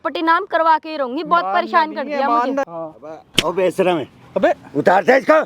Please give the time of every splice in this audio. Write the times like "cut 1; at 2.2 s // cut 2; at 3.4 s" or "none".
cut 1; at 2.7 s